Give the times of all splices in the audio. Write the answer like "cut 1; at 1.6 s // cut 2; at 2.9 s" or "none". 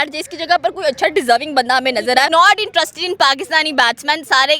cut 1; at 2.3 s

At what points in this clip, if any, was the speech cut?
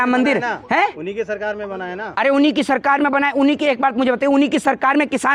none

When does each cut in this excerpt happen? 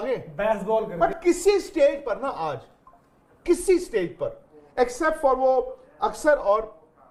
none

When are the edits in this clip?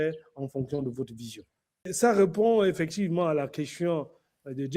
cut 1; at 1.9 s

